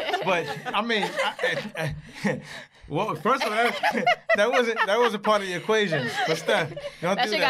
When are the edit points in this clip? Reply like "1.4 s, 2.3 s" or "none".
3.9 s